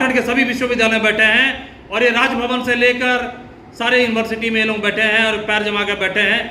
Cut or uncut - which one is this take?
uncut